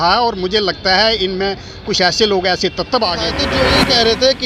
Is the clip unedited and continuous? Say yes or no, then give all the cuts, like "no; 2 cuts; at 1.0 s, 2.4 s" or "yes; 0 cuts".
no; 1 cut; at 3.4 s